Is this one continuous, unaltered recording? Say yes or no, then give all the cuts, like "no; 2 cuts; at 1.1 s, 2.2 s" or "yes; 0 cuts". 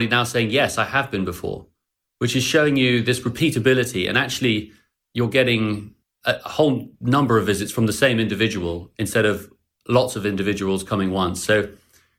yes; 0 cuts